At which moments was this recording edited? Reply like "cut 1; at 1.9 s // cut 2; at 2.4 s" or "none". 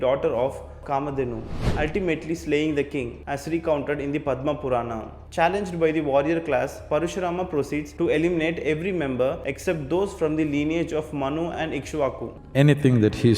cut 1; at 1.7 s // cut 2; at 12.3 s